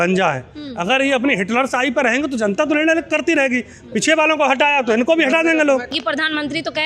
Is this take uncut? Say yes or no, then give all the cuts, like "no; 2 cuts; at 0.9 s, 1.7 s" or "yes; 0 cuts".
no; 1 cut; at 5.9 s